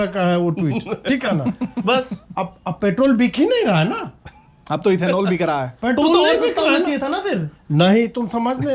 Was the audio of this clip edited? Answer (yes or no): no